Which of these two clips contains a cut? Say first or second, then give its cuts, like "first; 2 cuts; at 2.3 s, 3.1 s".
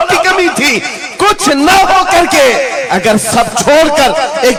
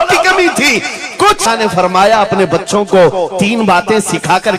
second; 1 cut; at 1.4 s